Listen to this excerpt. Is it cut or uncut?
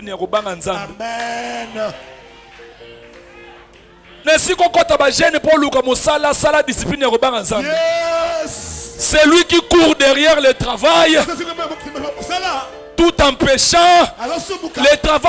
uncut